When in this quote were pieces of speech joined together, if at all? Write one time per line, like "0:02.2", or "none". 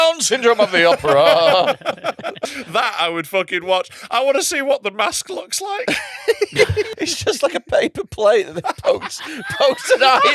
0:02.5
0:06.9